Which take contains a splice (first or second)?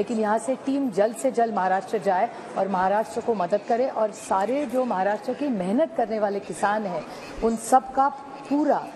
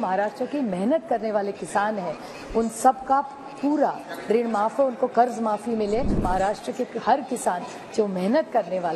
second